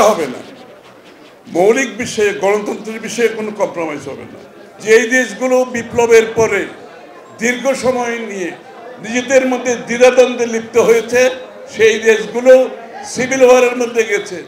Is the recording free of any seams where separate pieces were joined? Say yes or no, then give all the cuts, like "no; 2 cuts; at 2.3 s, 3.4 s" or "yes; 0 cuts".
no; 1 cut; at 4.8 s